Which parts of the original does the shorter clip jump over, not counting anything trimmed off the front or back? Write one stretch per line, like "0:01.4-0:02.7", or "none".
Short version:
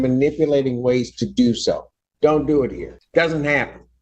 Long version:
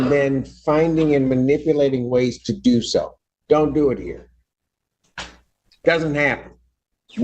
0:04.2-0:05.6